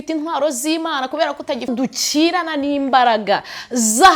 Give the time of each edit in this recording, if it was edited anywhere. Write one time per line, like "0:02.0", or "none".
0:01.7

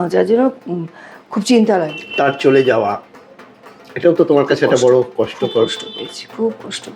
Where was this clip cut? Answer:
0:02.0

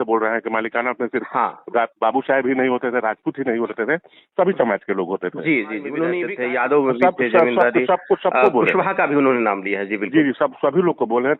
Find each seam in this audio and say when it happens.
0:06.3

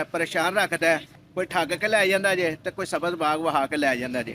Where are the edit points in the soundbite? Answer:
0:01.2

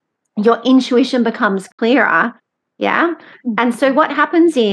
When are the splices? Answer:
0:01.7
0:02.4

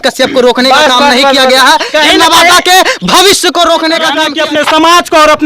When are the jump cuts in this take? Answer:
0:04.2

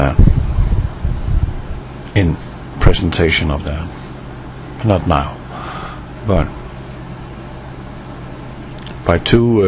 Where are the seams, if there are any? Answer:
0:01.3

